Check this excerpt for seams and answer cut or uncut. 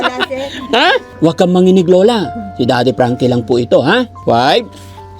cut